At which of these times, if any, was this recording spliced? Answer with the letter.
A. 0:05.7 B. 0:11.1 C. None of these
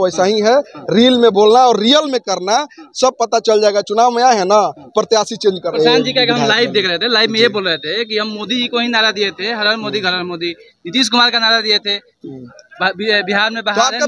A